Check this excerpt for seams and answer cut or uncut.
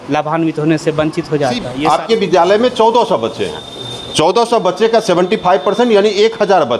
cut